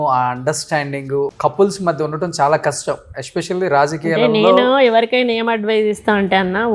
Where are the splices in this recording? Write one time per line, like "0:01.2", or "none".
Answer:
0:01.3